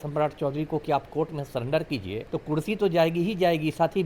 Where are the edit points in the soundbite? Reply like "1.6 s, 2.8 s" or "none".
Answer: 2.2 s